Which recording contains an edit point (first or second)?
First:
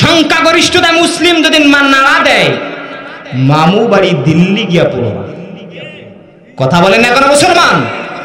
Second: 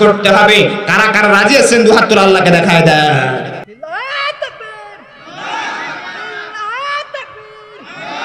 second